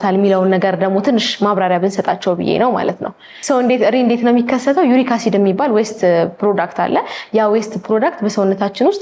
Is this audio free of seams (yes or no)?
yes